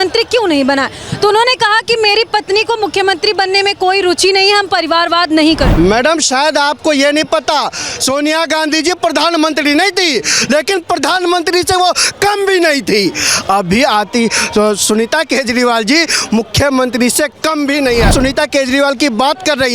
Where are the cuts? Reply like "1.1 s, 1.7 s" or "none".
5.7 s, 18.1 s